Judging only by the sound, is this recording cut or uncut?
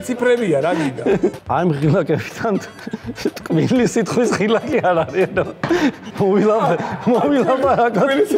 cut